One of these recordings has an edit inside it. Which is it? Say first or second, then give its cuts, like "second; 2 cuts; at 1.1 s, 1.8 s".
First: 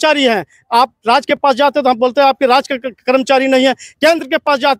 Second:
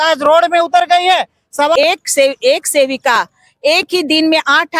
second; 1 cut; at 1.8 s